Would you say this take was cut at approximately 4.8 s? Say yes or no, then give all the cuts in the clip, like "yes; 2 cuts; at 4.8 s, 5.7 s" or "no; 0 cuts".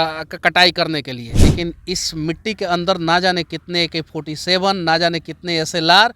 no; 1 cut; at 1.2 s